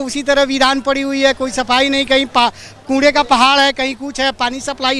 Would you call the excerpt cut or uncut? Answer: uncut